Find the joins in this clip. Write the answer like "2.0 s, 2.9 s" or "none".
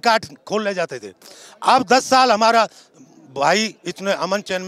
none